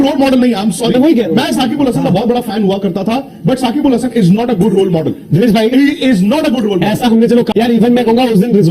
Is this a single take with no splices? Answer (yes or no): no